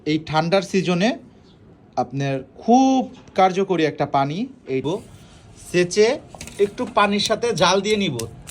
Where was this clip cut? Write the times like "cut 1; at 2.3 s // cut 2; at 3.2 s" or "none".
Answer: cut 1; at 4.8 s